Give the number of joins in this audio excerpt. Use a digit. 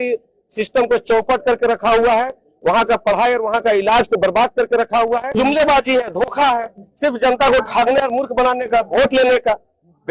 1